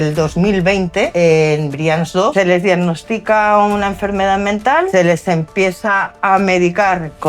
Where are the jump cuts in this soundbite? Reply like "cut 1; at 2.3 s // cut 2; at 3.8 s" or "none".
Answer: cut 1; at 1.1 s // cut 2; at 2.3 s // cut 3; at 4.9 s